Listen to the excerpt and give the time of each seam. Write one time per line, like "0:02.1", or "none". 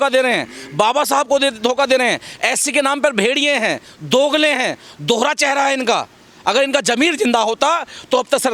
none